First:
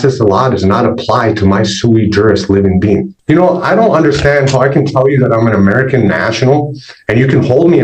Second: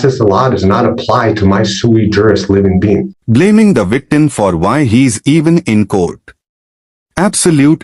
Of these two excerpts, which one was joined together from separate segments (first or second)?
first